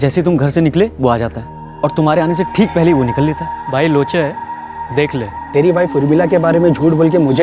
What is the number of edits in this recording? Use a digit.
2